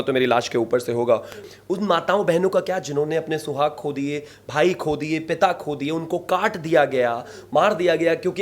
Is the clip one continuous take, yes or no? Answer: no